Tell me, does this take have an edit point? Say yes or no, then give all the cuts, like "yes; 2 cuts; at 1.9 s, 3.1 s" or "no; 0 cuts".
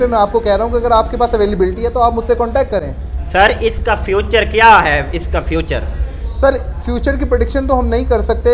no; 0 cuts